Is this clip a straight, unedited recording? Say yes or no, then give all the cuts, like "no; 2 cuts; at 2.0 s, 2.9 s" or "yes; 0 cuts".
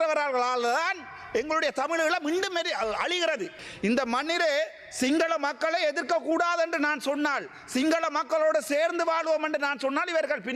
no; 1 cut; at 3.6 s